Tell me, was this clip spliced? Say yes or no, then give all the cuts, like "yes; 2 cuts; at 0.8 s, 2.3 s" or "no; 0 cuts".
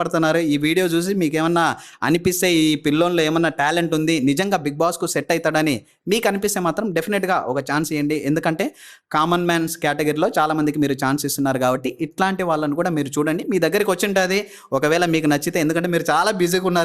no; 0 cuts